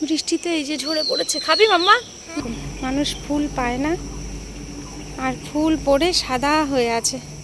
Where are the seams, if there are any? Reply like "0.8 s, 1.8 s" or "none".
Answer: 2.3 s